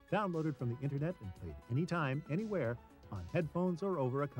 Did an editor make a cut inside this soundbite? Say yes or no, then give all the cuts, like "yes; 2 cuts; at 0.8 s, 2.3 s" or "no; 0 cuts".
no; 0 cuts